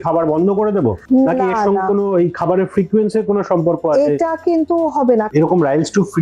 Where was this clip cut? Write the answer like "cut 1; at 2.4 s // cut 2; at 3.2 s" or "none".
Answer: cut 1; at 5.3 s